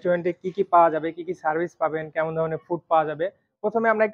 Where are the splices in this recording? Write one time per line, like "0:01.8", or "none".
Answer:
none